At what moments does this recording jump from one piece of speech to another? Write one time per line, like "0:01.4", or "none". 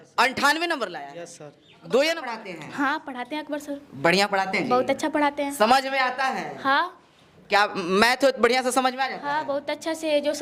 0:02.6